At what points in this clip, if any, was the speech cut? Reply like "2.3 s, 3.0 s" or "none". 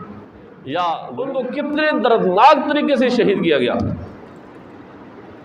1.1 s